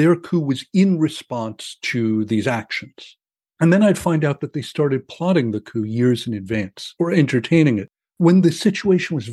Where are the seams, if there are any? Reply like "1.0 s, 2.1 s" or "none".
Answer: 6.8 s